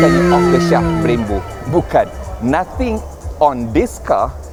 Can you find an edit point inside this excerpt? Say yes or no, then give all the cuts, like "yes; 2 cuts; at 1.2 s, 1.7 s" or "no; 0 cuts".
no; 0 cuts